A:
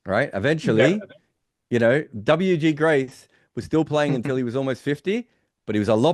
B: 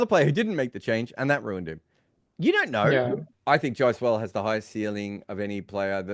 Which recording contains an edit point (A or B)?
B